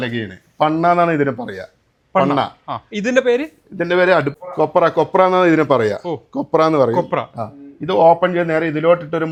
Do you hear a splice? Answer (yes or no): no